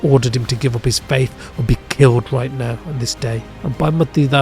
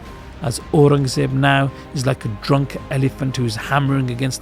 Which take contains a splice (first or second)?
first